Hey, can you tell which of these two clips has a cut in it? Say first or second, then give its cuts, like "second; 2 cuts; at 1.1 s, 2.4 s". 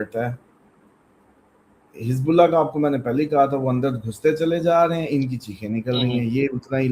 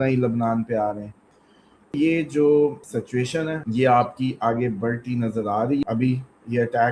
second; 2 cuts; at 1.9 s, 5.8 s